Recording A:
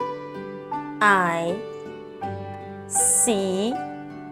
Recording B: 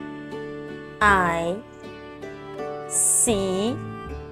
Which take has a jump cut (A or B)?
A